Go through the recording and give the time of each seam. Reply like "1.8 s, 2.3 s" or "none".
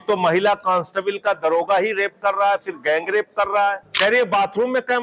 3.9 s